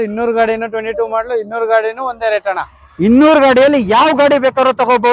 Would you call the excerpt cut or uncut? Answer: uncut